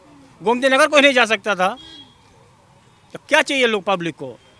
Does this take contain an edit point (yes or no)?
no